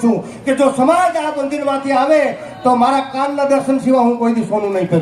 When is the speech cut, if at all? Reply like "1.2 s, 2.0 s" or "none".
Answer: none